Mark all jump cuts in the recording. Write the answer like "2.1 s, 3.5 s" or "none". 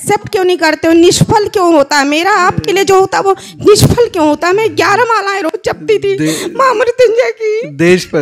none